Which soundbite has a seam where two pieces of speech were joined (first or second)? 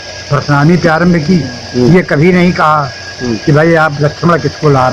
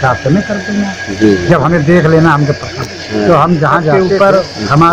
second